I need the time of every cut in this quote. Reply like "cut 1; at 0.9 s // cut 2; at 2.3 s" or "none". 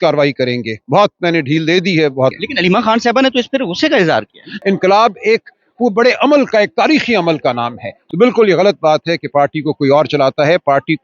cut 1; at 2.4 s // cut 2; at 4.4 s // cut 3; at 8.0 s

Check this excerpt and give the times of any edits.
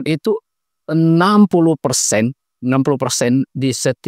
none

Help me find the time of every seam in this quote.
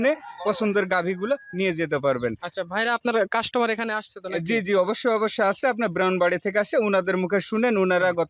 none

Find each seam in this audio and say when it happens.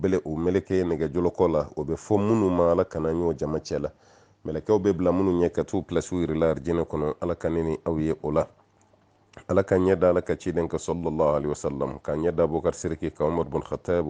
cut 1; at 1.0 s

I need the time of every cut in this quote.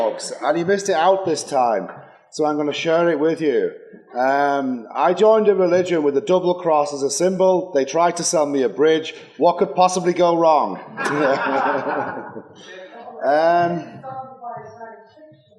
cut 1; at 13.0 s

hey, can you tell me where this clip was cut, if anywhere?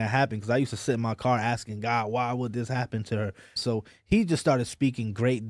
cut 1; at 3.6 s

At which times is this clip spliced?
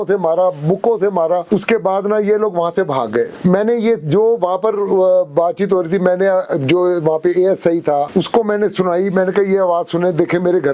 none

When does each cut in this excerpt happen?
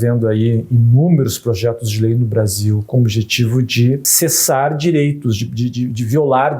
cut 1; at 2.9 s // cut 2; at 4.1 s

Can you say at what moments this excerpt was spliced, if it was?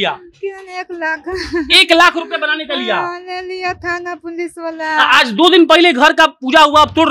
none

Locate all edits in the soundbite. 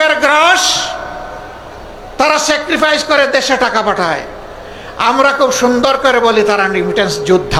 none

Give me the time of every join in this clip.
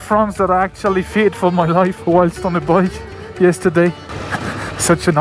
cut 1; at 4.3 s

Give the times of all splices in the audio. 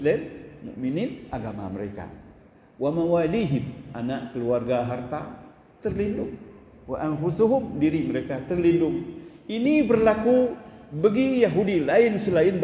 none

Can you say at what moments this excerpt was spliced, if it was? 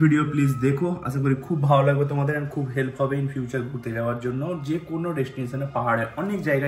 none

